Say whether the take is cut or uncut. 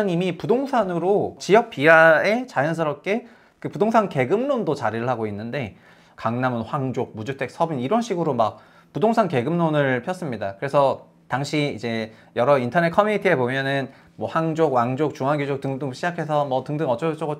cut